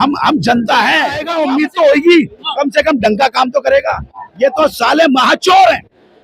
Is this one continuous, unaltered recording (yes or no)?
no